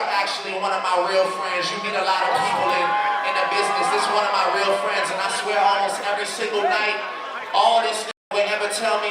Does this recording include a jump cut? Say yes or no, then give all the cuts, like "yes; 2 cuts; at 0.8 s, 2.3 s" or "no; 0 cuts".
no; 0 cuts